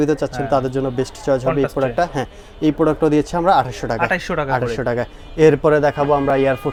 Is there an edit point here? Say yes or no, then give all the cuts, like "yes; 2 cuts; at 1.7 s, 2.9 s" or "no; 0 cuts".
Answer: no; 0 cuts